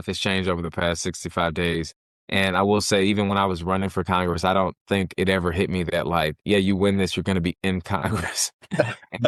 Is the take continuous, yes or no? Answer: yes